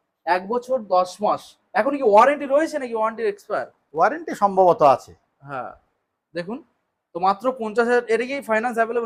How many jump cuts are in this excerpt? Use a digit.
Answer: 0